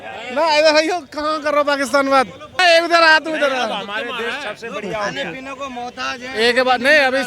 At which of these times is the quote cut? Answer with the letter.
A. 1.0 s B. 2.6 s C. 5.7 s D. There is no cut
B